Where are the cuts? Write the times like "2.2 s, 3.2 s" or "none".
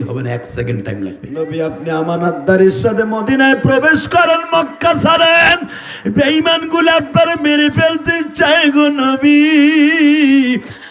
1.2 s